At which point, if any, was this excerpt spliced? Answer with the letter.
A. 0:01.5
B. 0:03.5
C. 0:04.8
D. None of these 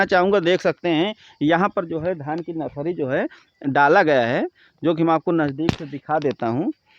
D